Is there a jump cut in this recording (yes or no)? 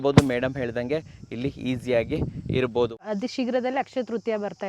yes